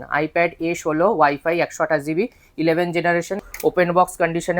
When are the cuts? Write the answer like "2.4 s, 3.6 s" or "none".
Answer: 3.4 s